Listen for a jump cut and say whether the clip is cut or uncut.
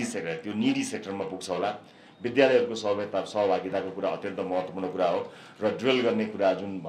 uncut